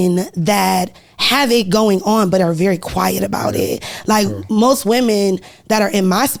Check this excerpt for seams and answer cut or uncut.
uncut